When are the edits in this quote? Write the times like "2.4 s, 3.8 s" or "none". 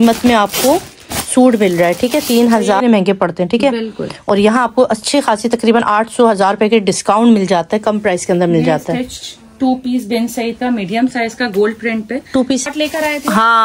2.8 s, 12.6 s